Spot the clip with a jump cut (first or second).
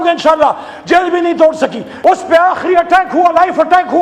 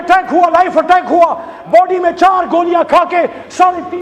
first